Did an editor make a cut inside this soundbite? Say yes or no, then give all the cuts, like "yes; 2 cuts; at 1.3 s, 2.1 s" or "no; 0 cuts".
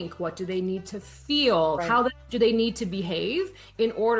yes; 1 cut; at 1.8 s